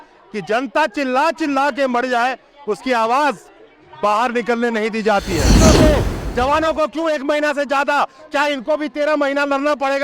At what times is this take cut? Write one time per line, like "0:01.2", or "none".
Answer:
0:05.6